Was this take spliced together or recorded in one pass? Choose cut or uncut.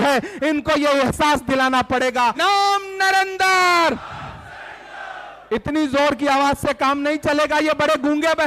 cut